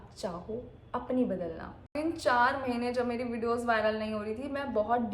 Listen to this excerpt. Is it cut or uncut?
cut